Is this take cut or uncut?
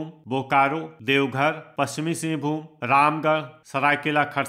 cut